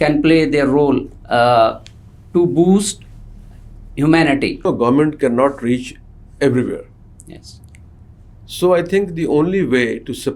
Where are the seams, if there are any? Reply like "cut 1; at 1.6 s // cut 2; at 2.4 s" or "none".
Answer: cut 1; at 4.7 s